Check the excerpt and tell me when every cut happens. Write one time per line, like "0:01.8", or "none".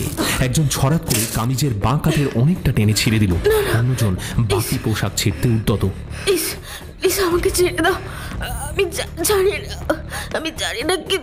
0:06.0

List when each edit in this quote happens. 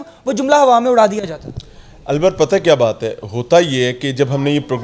none

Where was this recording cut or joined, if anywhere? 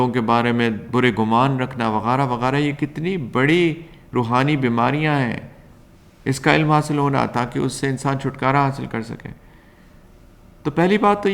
none

